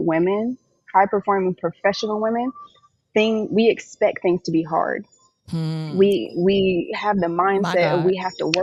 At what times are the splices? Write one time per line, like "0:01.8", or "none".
none

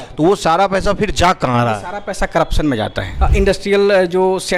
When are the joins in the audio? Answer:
0:03.0

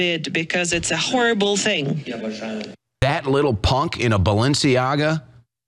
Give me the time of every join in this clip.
0:02.9

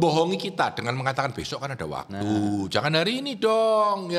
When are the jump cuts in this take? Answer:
none

